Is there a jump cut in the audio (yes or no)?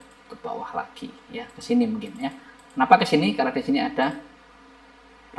no